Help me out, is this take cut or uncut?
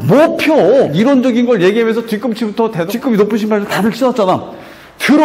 cut